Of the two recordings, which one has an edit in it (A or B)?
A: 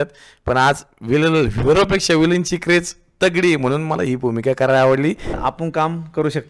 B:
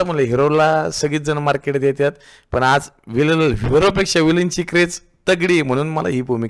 A